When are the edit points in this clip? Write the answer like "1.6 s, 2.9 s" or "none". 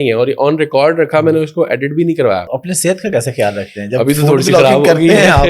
2.5 s